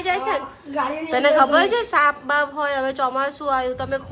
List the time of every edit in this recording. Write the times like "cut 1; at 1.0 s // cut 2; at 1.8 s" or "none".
none